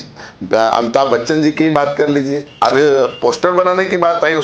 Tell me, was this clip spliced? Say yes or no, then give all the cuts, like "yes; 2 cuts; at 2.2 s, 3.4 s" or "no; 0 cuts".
yes; 1 cut; at 2.5 s